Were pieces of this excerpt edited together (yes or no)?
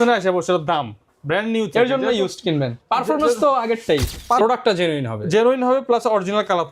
yes